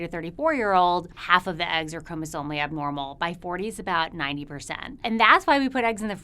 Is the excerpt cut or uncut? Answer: cut